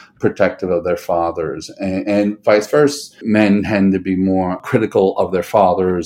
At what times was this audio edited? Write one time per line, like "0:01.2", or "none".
0:03.2
0:04.6